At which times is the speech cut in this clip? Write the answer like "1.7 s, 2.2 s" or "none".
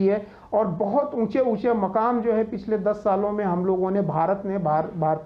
none